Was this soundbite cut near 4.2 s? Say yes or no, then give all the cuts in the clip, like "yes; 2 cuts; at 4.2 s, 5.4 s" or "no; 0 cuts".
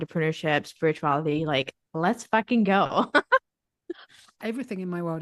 yes; 1 cut; at 4.2 s